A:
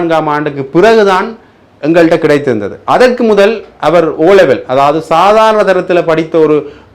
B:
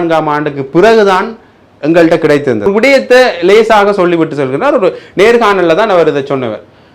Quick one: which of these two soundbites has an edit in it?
B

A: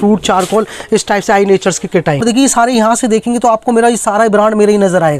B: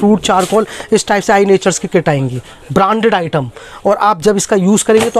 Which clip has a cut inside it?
A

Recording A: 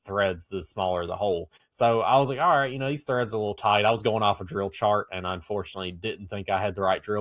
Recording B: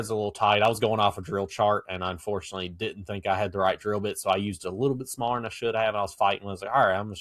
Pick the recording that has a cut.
A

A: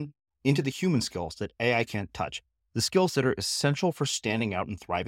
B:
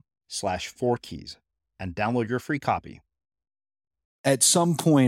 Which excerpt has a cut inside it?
B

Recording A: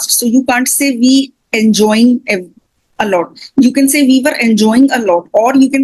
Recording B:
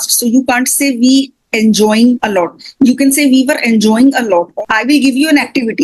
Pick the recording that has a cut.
B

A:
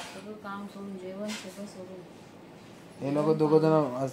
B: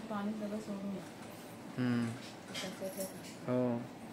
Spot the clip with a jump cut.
B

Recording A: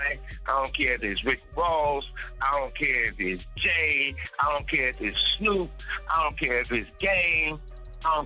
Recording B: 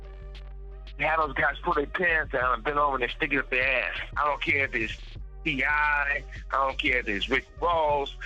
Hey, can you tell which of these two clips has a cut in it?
B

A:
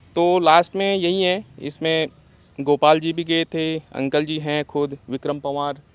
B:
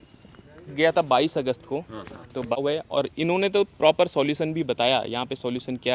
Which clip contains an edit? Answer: B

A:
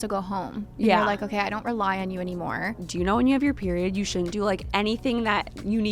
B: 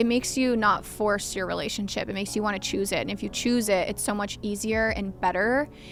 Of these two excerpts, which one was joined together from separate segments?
A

